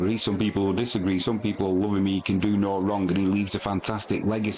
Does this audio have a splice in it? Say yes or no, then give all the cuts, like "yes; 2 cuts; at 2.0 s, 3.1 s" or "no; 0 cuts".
no; 0 cuts